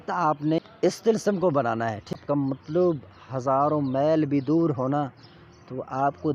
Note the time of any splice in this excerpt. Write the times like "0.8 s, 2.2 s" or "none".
0.8 s, 2.1 s